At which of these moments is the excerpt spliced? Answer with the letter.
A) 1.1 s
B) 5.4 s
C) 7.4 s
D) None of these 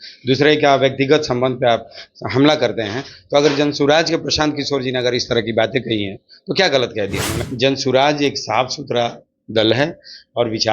C